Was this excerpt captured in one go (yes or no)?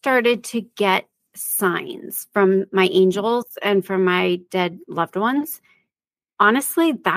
yes